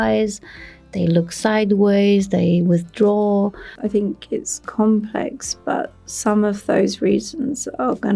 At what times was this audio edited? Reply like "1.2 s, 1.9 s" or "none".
3.7 s